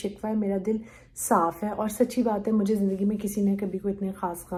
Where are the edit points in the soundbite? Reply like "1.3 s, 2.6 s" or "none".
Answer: none